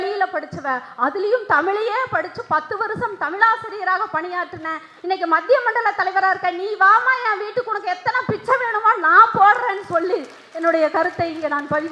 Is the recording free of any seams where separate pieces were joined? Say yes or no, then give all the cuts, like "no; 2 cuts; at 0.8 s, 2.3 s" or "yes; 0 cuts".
yes; 0 cuts